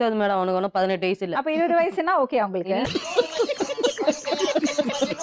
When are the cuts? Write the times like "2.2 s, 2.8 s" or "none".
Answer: none